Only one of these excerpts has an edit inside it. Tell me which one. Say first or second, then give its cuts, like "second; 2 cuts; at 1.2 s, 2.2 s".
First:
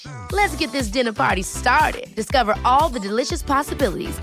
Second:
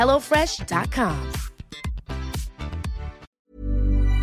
second; 1 cut; at 3.3 s